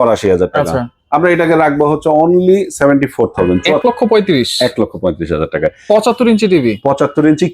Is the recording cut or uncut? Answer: cut